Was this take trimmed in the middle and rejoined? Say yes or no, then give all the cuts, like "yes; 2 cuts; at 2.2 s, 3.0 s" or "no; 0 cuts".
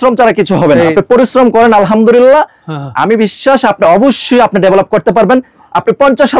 yes; 1 cut; at 0.9 s